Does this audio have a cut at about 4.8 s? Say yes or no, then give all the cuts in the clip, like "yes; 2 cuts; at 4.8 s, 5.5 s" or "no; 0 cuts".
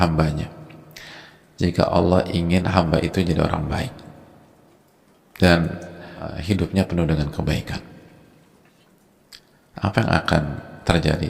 no; 1 cut; at 6.3 s